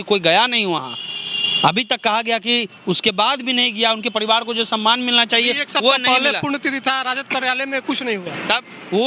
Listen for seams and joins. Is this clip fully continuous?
yes; 0 cuts

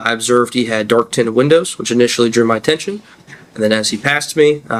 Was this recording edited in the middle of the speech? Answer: no; 0 cuts

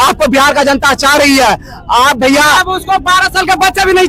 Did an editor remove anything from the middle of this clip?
no; 0 cuts

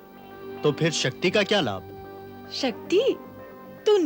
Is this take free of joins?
yes; 0 cuts

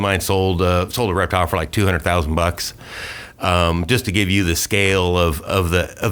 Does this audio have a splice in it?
no; 0 cuts

